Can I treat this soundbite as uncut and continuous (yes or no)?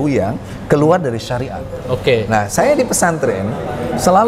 yes